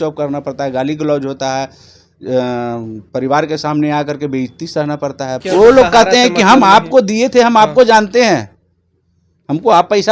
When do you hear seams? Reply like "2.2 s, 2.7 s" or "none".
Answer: 5.4 s